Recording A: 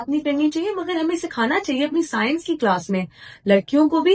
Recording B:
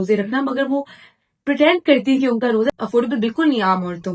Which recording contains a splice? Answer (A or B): B